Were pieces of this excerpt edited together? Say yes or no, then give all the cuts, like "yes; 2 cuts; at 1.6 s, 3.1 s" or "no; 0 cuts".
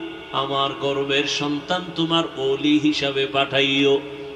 no; 0 cuts